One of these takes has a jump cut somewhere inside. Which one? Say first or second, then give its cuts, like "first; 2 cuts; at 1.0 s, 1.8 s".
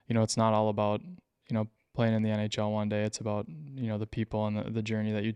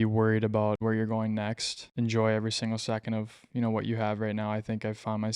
second; 2 cuts; at 0.8 s, 1.7 s